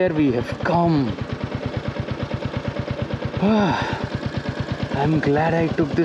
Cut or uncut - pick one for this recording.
uncut